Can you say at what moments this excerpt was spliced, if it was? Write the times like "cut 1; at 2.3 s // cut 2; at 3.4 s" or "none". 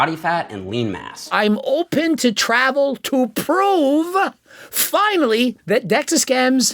cut 1; at 1.3 s